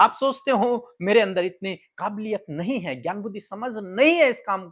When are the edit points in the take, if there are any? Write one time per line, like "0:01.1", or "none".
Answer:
none